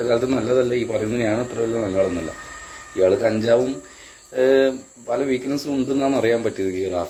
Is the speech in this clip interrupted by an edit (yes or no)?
no